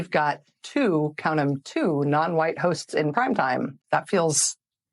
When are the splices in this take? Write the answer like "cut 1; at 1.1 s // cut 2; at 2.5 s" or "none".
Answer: cut 1; at 3.8 s

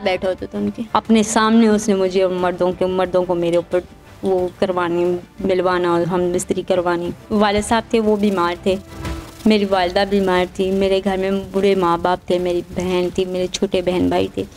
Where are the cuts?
cut 1; at 0.8 s // cut 2; at 7.2 s

